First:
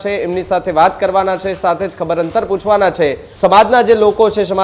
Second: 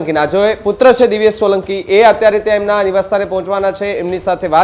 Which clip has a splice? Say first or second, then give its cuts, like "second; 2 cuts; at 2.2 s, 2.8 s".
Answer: first; 1 cut; at 3.2 s